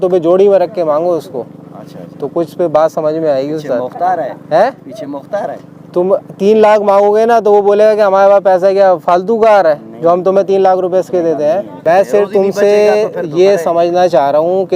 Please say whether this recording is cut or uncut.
cut